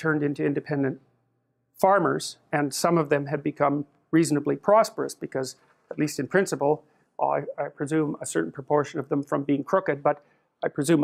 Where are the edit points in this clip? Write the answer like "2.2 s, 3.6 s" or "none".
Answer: none